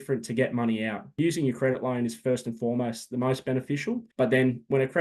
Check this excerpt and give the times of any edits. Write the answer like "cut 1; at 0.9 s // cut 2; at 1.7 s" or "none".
cut 1; at 1.2 s // cut 2; at 4.1 s